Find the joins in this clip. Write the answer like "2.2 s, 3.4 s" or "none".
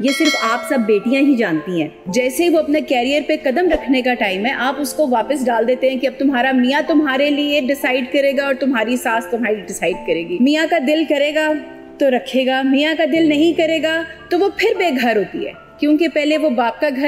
2.0 s, 10.4 s